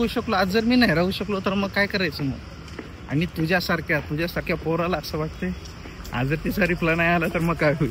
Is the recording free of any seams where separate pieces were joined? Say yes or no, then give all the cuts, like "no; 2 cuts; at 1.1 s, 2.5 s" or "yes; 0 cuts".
yes; 0 cuts